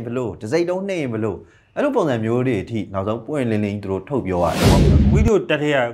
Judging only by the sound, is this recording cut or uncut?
cut